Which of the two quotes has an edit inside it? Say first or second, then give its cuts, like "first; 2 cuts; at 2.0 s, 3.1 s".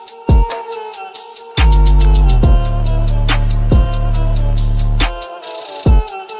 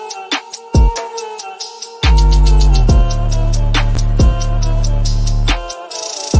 second; 1 cut; at 4.0 s